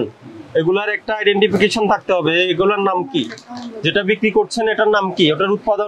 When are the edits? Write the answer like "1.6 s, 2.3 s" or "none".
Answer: none